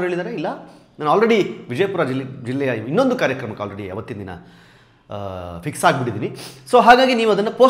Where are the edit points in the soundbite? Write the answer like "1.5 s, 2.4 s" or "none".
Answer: none